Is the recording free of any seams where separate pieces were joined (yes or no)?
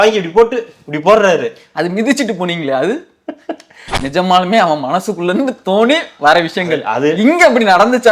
no